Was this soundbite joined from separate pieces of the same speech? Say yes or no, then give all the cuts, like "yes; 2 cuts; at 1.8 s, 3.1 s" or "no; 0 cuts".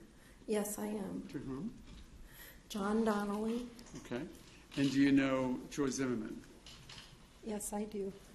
yes; 1 cut; at 1.2 s